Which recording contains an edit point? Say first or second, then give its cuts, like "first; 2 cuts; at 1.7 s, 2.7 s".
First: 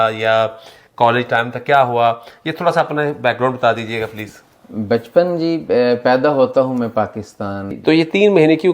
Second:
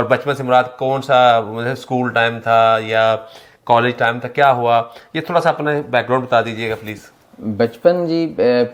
first; 1 cut; at 7.6 s